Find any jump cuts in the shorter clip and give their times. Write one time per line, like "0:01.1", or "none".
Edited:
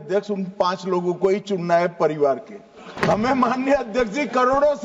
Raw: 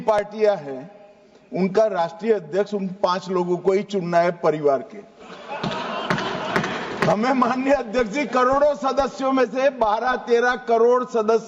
0:02.8

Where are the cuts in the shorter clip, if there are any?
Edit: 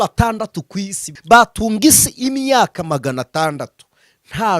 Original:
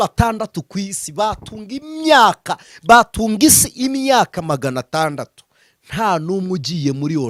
0:01.0

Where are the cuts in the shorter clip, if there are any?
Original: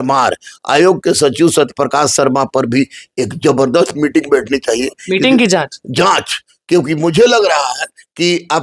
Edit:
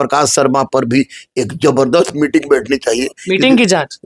none

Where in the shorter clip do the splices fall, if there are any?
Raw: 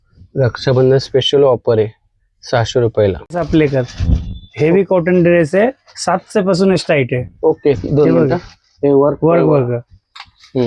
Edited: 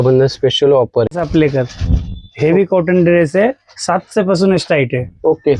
0:01.1

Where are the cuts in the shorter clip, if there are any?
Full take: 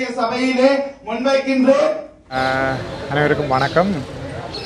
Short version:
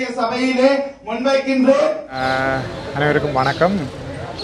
0:02.1

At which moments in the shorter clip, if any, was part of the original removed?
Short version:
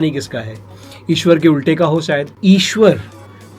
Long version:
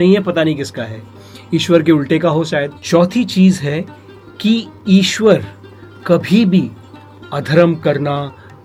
0:02.3

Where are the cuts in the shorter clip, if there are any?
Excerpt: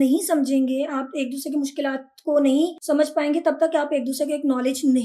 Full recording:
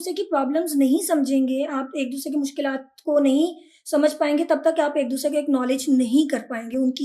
0:02.8

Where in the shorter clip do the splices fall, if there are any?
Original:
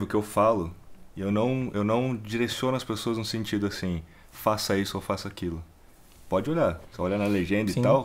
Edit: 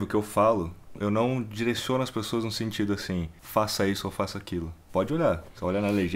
0:00.9
0:03.4
0:04.8

